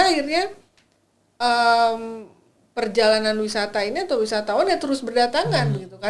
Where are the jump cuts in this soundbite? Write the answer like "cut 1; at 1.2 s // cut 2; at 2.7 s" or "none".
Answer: none